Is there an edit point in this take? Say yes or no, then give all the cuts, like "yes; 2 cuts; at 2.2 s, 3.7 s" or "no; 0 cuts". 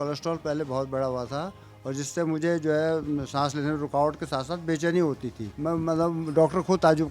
yes; 1 cut; at 5.5 s